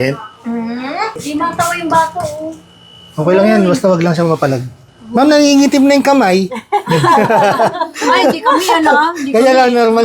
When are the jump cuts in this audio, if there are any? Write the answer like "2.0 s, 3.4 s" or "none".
1.2 s